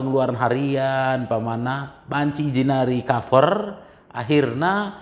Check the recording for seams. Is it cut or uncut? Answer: uncut